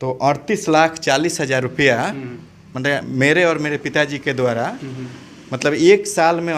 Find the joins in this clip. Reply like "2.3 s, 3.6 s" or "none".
none